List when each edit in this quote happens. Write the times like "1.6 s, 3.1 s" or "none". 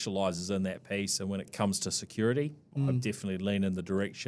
1.5 s, 2.7 s